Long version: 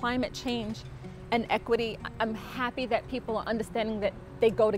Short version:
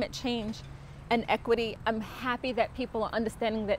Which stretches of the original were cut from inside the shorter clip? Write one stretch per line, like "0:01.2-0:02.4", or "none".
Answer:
0:02.0-0:02.1